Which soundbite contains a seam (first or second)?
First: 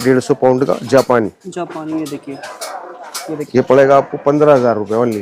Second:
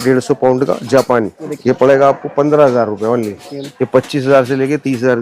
second